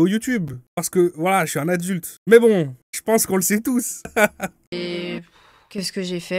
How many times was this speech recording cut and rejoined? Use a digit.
1